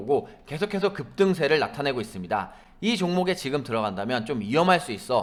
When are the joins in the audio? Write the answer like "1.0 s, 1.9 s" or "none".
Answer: none